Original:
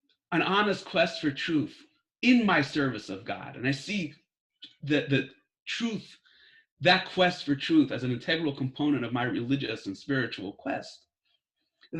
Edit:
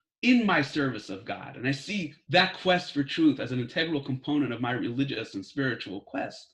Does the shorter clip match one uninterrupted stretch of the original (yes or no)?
no